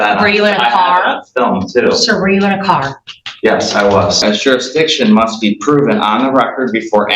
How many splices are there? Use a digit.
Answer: 1